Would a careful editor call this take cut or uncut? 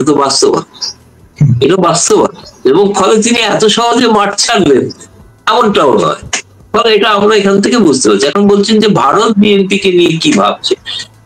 uncut